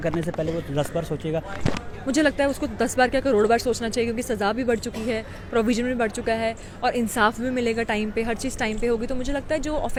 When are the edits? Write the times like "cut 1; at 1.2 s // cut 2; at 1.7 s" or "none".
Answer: none